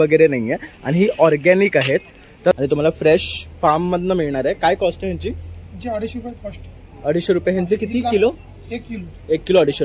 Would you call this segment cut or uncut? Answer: cut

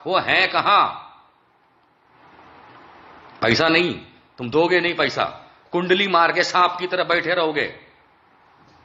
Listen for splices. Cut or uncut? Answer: uncut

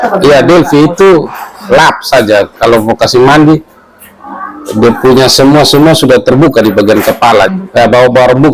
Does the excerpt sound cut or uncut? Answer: cut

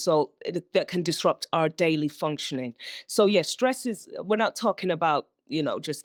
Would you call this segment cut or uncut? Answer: uncut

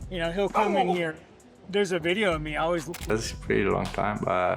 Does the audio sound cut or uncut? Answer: cut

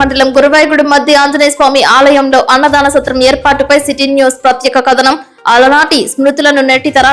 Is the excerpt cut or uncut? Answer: uncut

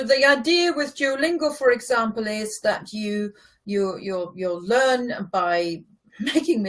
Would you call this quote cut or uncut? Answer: uncut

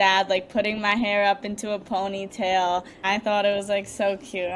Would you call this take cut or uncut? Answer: cut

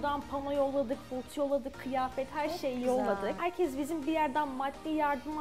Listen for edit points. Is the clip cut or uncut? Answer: cut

